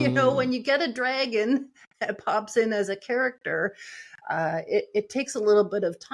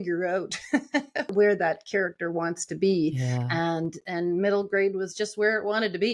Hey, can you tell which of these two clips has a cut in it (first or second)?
second